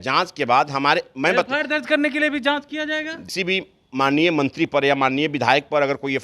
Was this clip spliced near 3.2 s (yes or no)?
yes